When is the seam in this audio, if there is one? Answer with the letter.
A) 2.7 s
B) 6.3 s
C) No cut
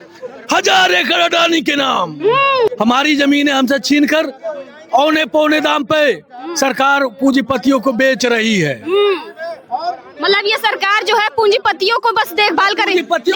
A